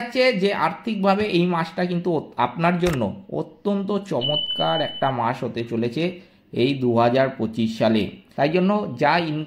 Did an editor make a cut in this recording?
yes; 1 cut; at 8.2 s

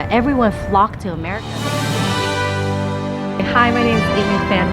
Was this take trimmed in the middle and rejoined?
yes; 1 cut; at 1.0 s

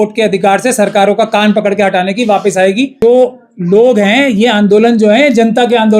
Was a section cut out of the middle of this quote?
yes; 1 cut; at 2.9 s

